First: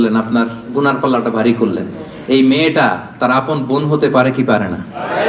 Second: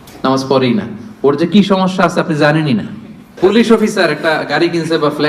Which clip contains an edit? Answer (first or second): second